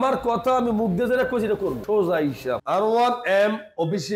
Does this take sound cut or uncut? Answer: cut